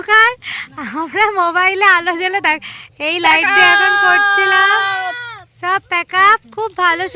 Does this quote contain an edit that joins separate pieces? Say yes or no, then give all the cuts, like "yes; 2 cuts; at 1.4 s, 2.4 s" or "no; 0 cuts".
no; 0 cuts